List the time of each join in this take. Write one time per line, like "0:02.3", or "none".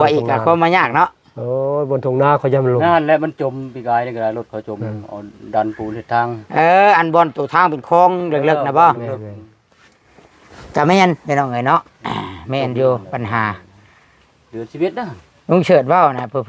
none